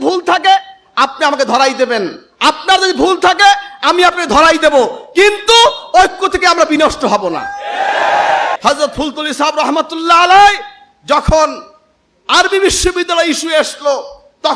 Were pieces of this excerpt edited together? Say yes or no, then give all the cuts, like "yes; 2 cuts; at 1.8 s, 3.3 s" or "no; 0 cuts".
yes; 1 cut; at 8.6 s